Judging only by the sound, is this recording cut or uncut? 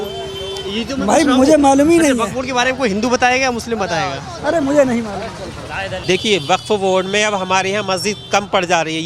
cut